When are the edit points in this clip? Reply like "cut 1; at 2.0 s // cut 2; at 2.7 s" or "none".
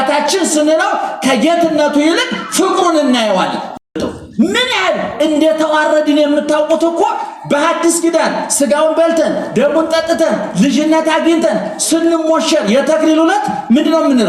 cut 1; at 3.8 s